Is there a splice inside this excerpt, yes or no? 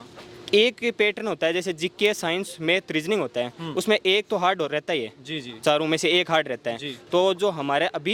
no